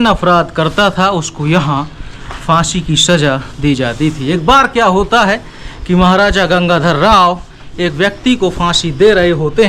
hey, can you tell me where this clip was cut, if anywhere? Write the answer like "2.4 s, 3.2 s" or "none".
none

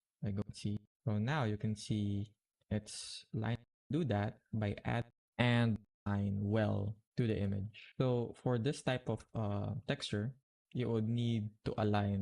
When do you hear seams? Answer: 0.8 s, 3.9 s, 5.1 s, 6.1 s

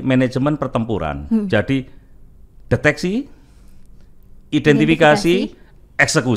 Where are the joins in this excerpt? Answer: none

